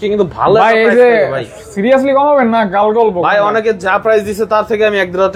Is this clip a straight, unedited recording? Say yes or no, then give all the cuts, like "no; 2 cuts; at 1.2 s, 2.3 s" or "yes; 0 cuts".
yes; 0 cuts